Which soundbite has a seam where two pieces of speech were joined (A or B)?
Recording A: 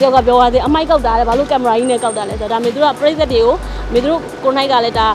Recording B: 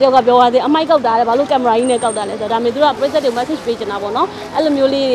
B